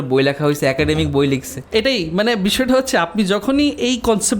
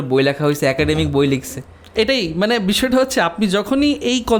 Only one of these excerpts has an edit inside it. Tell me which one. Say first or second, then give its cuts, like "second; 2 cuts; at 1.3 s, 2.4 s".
first; 1 cut; at 1.6 s